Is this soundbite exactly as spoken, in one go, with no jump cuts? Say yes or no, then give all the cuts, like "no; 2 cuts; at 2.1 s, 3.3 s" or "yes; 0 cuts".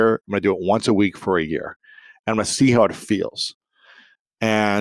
yes; 0 cuts